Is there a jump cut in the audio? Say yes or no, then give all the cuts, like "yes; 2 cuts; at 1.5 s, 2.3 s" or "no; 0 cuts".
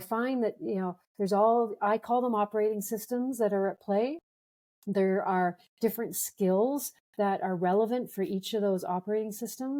no; 0 cuts